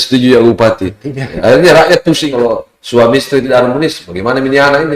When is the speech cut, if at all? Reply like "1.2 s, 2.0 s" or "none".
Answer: 2.3 s